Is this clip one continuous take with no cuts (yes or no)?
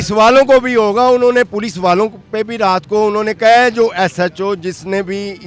yes